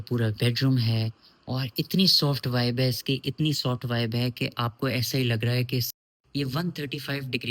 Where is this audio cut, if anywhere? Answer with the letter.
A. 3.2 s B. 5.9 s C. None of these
B